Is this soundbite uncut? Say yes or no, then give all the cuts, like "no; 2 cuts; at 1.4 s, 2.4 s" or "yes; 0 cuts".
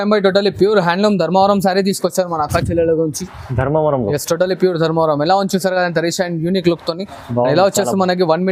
yes; 0 cuts